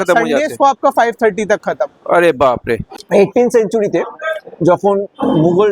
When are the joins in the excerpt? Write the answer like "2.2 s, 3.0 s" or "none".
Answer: 2.9 s

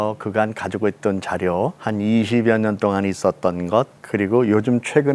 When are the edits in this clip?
1.8 s, 4.0 s

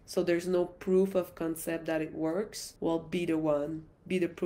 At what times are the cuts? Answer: 2.6 s

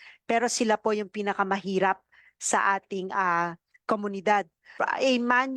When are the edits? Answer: 4.6 s

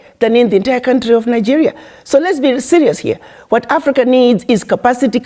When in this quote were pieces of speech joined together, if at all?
none

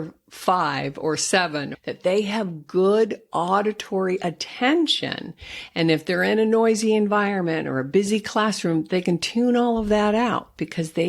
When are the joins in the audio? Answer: 1.7 s

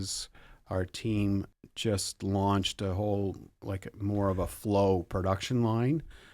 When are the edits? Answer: 1.6 s

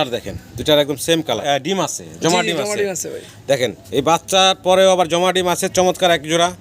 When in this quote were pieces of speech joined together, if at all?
1.4 s

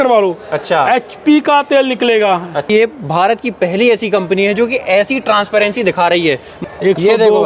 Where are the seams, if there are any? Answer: 2.7 s, 6.5 s

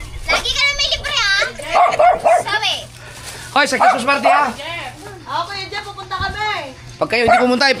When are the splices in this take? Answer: none

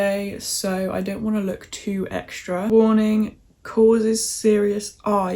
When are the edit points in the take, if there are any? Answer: 2.7 s

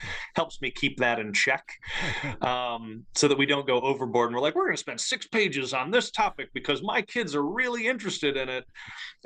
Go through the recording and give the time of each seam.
none

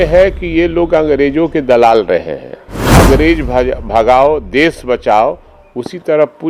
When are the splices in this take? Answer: 2.9 s

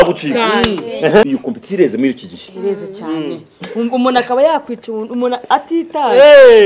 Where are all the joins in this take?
1.3 s

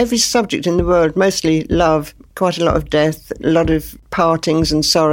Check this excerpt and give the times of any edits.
2.2 s, 4.0 s

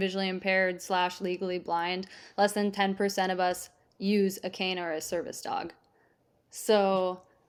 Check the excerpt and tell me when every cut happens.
none

